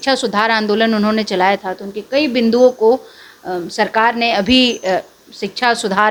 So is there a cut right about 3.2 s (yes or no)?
no